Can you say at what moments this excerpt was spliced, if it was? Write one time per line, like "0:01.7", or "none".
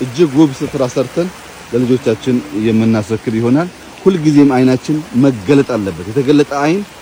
none